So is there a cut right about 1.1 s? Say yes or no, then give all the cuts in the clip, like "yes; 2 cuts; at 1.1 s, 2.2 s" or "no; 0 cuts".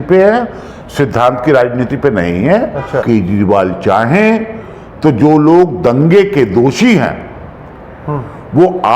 no; 1 cut; at 3.0 s